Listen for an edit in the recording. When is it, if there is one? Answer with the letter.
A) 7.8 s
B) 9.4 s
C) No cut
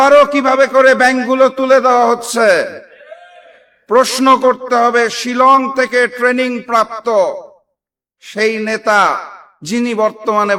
C